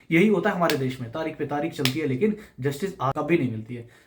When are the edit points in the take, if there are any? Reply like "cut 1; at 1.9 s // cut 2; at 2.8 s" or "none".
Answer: cut 1; at 3.1 s

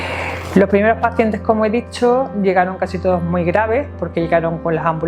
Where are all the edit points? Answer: none

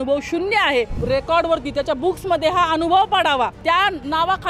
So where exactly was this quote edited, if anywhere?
cut 1; at 1.0 s // cut 2; at 3.6 s

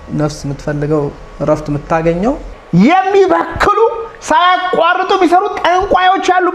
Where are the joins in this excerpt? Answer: cut 1; at 2.5 s

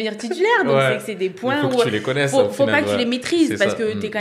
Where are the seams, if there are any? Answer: none

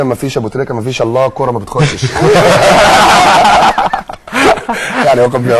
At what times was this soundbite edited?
cut 1; at 3.4 s

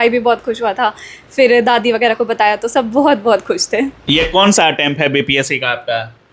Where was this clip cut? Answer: cut 1; at 4.0 s

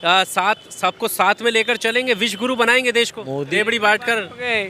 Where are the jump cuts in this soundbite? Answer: cut 1; at 3.5 s

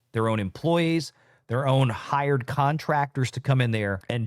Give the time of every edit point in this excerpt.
none

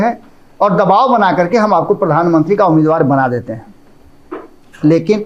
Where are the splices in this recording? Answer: none

